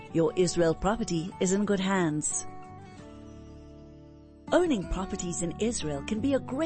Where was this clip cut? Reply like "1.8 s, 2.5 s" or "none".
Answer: 2.3 s, 4.4 s